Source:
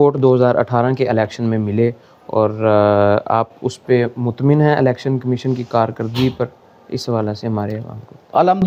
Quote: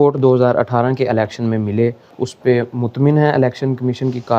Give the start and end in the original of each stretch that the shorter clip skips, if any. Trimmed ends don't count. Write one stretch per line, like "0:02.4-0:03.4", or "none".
0:02.2-0:03.6